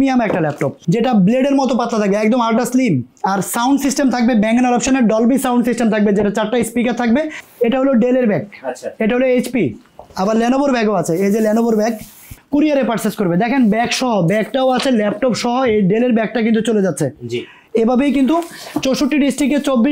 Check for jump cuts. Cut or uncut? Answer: cut